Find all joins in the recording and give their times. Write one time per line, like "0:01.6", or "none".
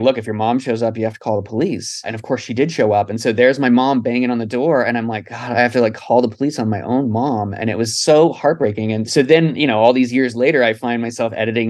0:02.2
0:09.0